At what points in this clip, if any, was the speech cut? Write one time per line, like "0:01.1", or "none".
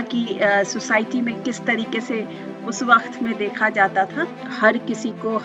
0:04.5